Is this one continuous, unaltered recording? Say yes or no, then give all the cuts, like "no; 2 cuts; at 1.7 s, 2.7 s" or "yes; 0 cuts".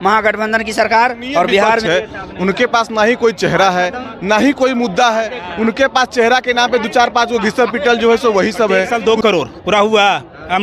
no; 2 cuts; at 1.8 s, 8.9 s